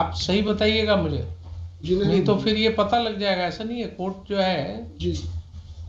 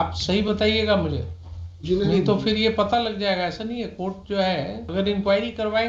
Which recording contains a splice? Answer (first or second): second